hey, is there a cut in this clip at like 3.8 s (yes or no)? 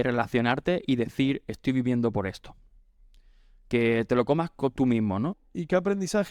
no